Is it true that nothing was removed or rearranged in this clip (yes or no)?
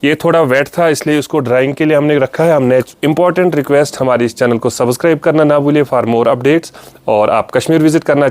no